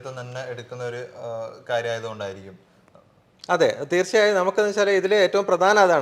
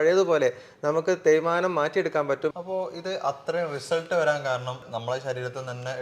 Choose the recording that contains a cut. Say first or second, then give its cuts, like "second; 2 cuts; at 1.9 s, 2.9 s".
second; 1 cut; at 2.5 s